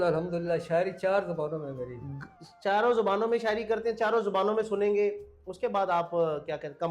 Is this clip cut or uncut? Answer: uncut